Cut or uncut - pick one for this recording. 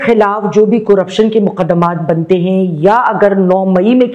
uncut